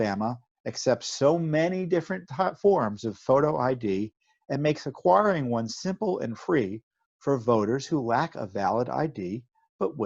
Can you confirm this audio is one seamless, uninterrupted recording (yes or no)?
yes